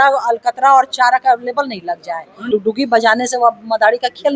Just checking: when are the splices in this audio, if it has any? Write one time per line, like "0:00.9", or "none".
0:02.4